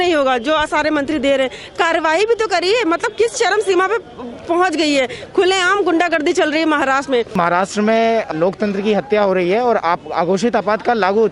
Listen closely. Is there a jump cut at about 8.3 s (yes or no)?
yes